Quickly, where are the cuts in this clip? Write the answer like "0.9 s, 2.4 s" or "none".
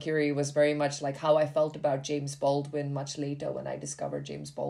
none